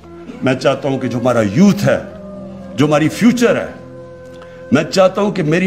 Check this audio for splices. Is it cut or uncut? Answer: uncut